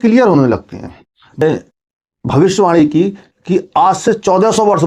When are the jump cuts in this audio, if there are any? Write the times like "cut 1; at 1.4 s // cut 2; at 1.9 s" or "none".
cut 1; at 1.4 s